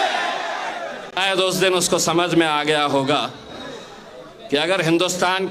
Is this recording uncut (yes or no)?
no